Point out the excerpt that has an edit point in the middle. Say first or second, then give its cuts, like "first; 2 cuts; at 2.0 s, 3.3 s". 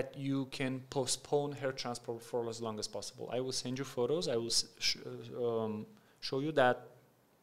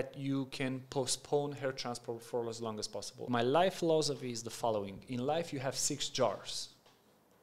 second; 1 cut; at 3.2 s